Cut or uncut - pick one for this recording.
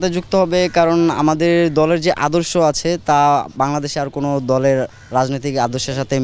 uncut